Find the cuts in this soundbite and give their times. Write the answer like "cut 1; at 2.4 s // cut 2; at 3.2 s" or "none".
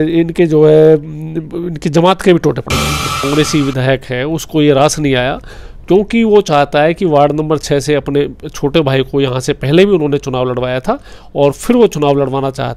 cut 1; at 3.2 s

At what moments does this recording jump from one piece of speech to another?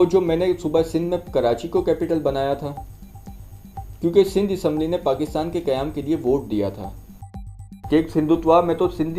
cut 1; at 7.6 s

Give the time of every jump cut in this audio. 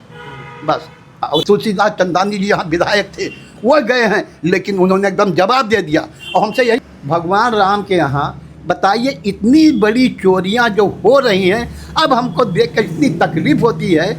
cut 1; at 1.4 s // cut 2; at 6.8 s

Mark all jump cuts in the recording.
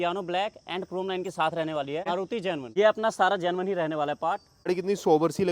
cut 1; at 2.2 s // cut 2; at 4.7 s

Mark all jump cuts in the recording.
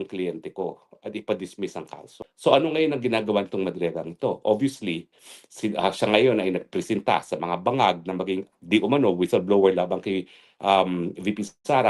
cut 1; at 2.0 s

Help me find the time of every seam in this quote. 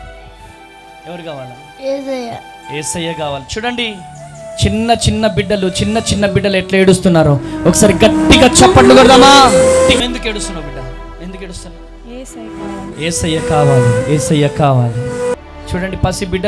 cut 1; at 10.0 s // cut 2; at 15.3 s

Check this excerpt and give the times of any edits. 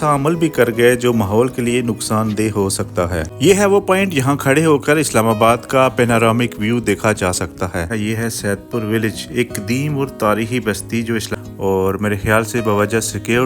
cut 1; at 3.3 s // cut 2; at 7.9 s // cut 3; at 11.3 s

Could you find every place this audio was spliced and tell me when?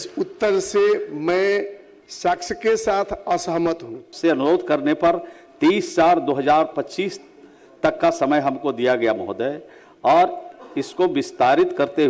cut 1; at 4.1 s

